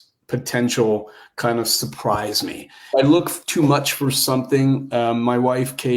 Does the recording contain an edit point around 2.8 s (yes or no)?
yes